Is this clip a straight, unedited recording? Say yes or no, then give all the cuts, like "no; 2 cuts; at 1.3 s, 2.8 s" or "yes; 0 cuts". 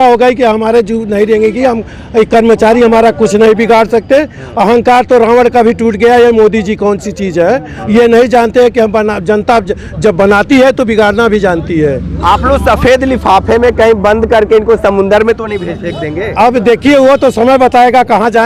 yes; 0 cuts